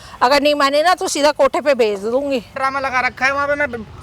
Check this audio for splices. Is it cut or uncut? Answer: cut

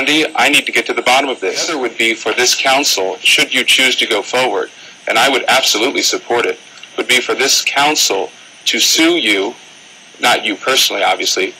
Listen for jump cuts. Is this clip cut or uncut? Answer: cut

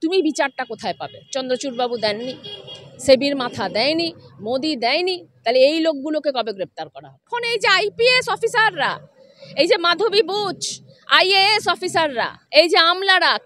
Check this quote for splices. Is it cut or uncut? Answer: cut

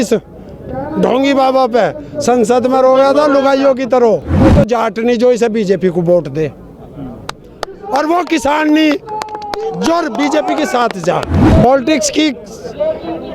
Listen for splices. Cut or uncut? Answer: cut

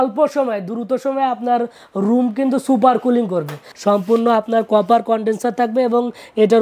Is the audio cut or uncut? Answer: cut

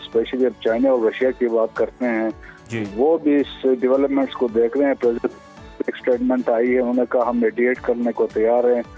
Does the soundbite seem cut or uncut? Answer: uncut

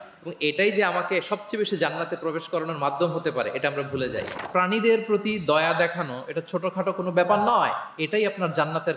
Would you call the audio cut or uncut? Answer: cut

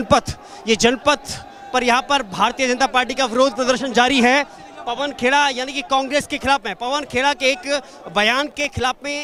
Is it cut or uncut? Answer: uncut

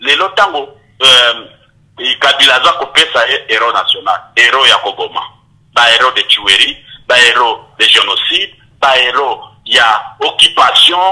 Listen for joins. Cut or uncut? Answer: uncut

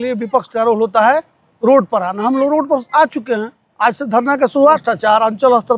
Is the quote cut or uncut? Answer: cut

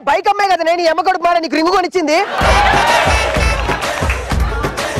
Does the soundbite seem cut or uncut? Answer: uncut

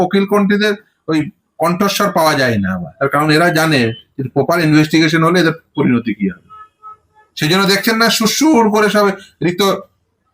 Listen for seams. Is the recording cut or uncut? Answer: cut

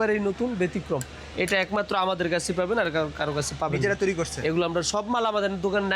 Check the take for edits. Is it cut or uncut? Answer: uncut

